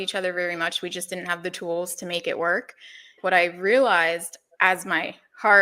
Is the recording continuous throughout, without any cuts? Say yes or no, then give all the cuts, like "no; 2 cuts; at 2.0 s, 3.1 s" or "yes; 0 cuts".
no; 1 cut; at 3.1 s